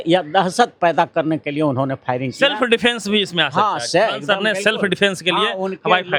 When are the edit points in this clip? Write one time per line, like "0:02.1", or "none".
none